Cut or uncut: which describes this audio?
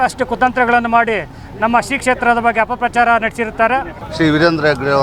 cut